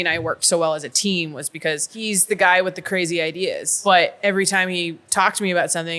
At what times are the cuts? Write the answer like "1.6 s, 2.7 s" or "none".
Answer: 1.9 s, 3.7 s